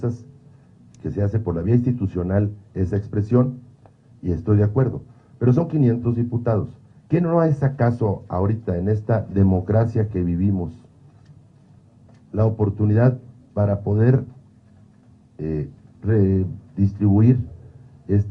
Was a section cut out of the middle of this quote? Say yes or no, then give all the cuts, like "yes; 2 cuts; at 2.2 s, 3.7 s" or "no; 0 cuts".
no; 0 cuts